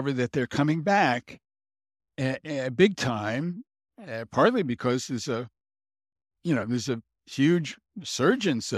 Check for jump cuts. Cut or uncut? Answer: uncut